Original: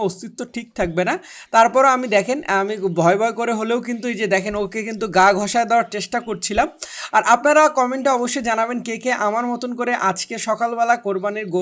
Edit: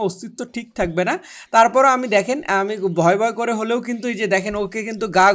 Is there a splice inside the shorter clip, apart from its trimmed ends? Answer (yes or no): no